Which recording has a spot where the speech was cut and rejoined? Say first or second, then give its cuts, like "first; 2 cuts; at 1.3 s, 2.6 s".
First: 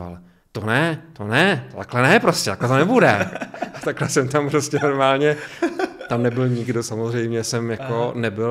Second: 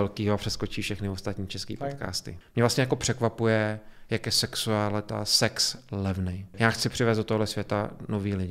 second; 2 cuts; at 2.3 s, 6.4 s